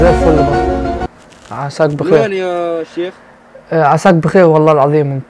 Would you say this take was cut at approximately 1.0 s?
yes; 1 cut; at 1.0 s

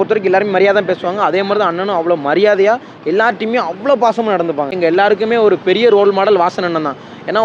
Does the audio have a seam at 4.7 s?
yes; 1 cut; at 4.7 s

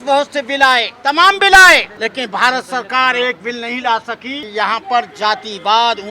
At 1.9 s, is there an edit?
yes; 3 cuts; at 0.9 s, 1.9 s, 4.3 s

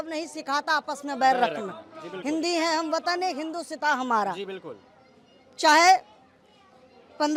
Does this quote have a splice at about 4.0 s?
no; 0 cuts

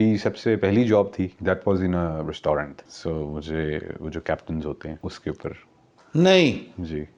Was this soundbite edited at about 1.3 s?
yes; 3 cuts; at 1.3 s, 2.8 s, 5.0 s

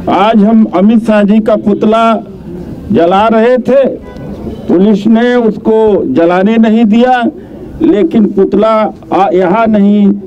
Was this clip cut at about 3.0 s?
no; 0 cuts

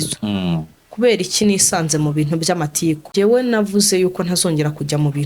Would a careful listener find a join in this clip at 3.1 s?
yes; 1 cut; at 3.1 s

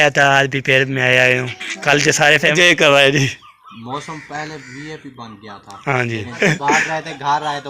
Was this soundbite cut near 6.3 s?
yes; 2 cuts; at 2.6 s, 6.3 s

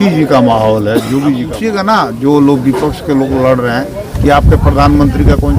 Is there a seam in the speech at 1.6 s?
yes; 1 cut; at 1.6 s

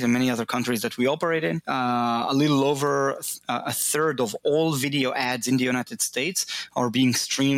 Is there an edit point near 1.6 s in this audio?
yes; 1 cut; at 1.6 s

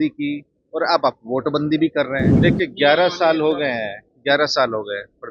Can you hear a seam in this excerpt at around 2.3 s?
yes; 1 cut; at 2.3 s

